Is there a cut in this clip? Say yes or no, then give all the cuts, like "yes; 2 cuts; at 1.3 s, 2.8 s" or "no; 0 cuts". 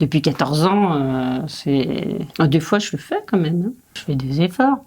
yes; 2 cuts; at 2.2 s, 4.0 s